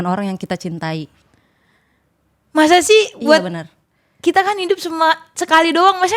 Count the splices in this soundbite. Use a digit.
0